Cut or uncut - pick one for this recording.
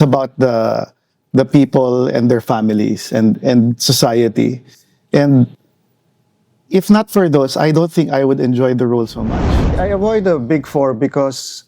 cut